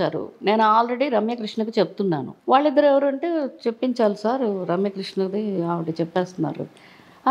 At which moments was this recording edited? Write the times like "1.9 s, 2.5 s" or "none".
2.3 s